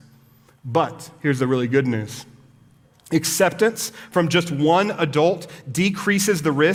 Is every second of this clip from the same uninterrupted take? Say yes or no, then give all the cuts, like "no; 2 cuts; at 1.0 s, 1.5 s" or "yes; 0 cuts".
yes; 0 cuts